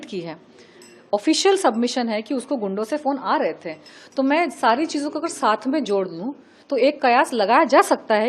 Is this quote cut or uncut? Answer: uncut